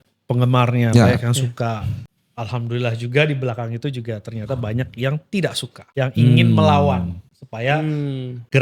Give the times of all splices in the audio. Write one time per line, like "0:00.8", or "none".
0:01.9